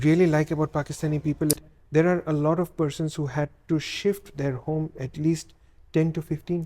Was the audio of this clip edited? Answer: yes; 1 cut; at 1.7 s

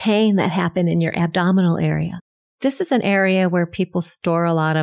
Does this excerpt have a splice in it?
yes; 1 cut; at 2.1 s

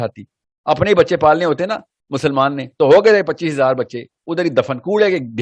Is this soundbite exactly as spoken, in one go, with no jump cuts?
yes; 0 cuts

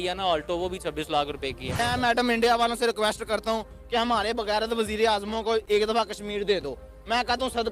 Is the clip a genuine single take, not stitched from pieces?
no; 1 cut; at 1.6 s

